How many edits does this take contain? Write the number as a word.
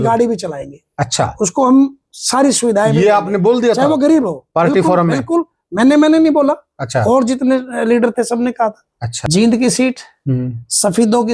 one